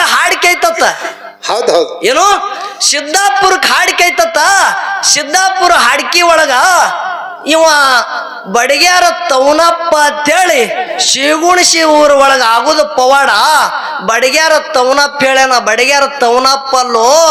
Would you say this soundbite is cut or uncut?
uncut